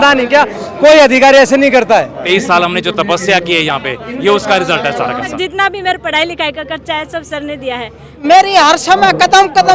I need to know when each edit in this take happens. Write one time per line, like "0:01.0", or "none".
0:02.2
0:05.3
0:08.2